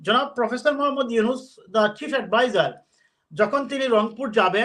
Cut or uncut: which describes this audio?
uncut